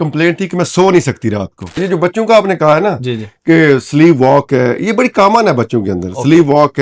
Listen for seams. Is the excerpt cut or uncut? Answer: cut